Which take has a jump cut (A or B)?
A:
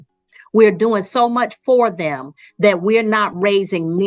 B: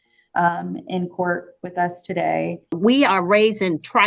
B